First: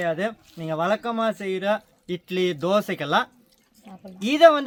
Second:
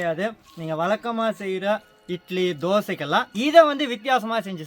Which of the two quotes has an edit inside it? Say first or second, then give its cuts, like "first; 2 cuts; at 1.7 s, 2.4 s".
second; 1 cut; at 3.3 s